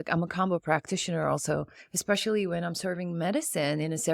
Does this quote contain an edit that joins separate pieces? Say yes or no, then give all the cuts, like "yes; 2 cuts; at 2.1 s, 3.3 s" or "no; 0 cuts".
no; 0 cuts